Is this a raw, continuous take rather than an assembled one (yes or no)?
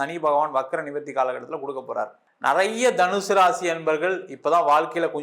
no